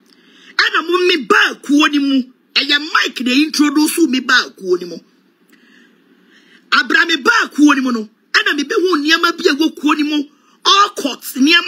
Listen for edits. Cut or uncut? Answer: uncut